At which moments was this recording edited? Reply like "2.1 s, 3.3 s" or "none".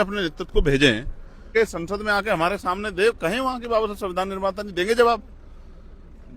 1.5 s